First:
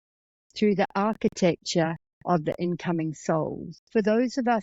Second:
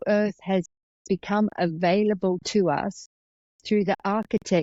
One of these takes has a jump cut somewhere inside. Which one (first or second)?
first